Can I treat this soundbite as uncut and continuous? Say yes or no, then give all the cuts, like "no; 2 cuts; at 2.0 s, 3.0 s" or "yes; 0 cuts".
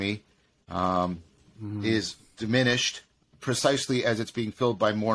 yes; 0 cuts